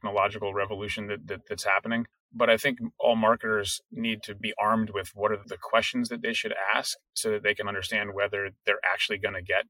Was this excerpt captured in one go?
no; 3 cuts; at 2.2 s, 4.4 s, 5.5 s

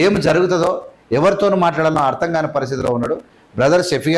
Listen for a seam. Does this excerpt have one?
no; 0 cuts

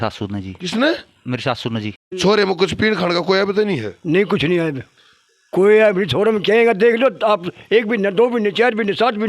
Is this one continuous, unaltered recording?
no; 1 cut; at 2.1 s

